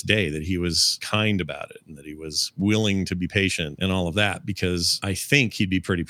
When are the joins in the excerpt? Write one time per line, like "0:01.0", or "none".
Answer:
0:01.0
0:03.7
0:04.9